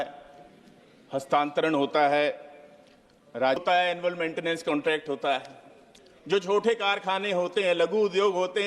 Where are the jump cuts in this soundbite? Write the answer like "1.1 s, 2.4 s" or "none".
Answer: 3.6 s

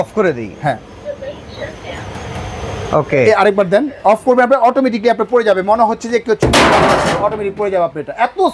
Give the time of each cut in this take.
none

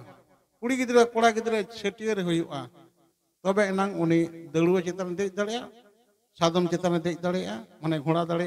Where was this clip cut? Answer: none

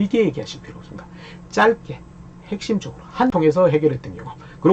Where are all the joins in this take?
3.3 s

